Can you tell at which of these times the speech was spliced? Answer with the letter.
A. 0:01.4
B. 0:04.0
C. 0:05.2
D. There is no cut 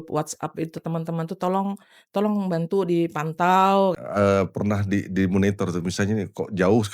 B